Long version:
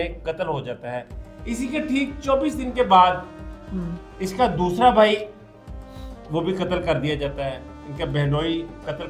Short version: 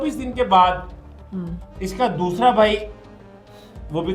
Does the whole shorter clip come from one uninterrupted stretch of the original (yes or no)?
yes